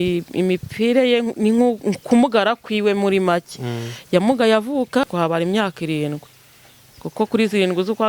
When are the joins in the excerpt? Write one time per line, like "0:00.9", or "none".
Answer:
0:05.1